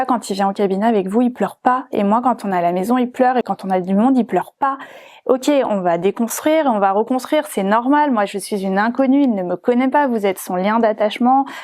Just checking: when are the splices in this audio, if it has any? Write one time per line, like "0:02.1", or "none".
none